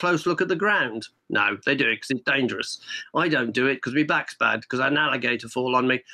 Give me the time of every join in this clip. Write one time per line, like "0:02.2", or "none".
none